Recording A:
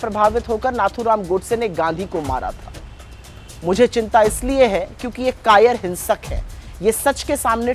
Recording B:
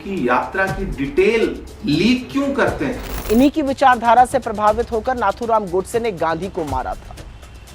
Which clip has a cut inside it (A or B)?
B